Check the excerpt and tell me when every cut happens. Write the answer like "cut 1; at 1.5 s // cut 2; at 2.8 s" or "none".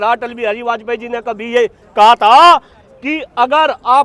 none

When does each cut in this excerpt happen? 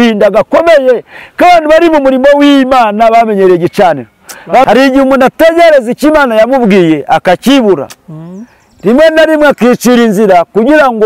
cut 1; at 4.6 s

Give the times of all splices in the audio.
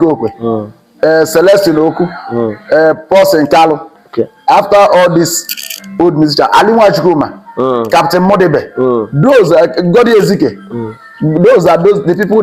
none

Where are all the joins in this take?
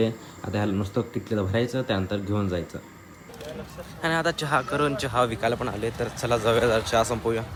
none

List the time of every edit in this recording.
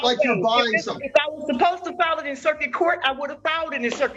none

